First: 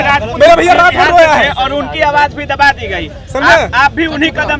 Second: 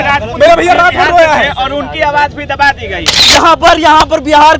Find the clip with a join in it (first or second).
second